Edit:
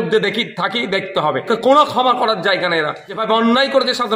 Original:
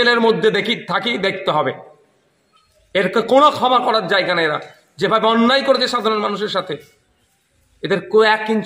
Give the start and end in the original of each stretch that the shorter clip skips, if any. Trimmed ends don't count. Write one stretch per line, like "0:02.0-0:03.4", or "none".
0:01.8-0:03.1
0:04.8-0:05.0